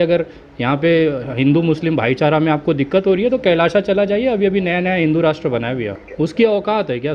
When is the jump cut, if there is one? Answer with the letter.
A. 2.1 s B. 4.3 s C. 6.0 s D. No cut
C